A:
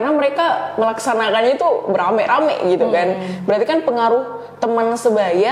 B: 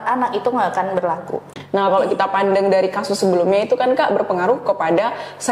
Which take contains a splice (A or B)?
B